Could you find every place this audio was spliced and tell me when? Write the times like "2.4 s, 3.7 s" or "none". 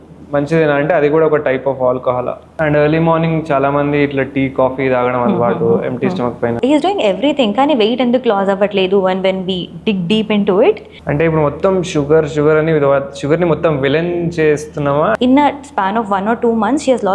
2.4 s, 6.6 s, 10.9 s, 15.2 s